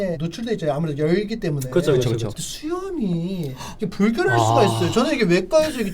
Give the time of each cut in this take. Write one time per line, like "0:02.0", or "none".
0:02.3